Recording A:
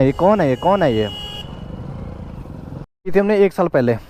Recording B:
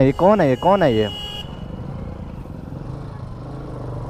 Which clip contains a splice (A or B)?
A